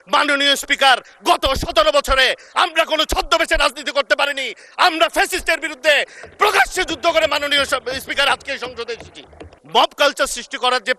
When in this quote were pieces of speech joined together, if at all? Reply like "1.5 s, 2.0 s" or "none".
9.5 s